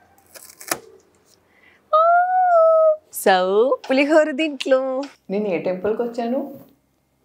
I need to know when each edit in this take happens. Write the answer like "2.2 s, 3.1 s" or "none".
3.1 s, 5.2 s